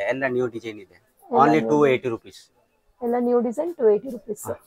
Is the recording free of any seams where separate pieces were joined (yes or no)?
yes